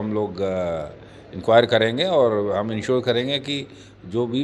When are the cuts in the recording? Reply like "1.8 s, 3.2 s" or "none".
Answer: none